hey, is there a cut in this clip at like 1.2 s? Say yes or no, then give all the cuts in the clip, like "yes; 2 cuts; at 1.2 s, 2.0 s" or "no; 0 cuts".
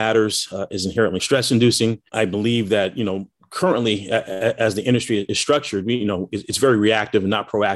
yes; 2 cuts; at 1.2 s, 5.3 s